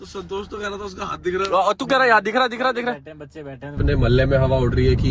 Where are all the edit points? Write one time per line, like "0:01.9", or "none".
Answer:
0:03.8